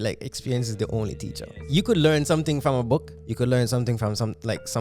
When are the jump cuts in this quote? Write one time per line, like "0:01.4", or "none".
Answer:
0:01.6
0:03.2